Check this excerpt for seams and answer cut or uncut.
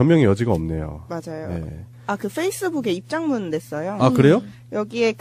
uncut